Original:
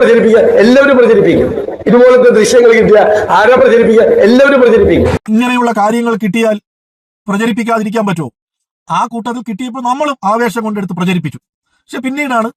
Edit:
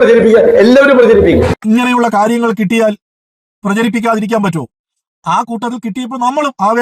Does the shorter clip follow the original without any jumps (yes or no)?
no